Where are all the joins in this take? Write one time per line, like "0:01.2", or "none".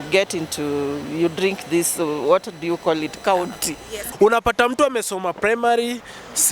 0:04.0